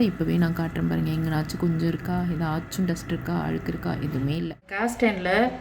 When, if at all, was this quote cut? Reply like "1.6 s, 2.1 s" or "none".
4.6 s